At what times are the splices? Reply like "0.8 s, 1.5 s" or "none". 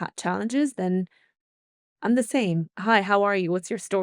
2.7 s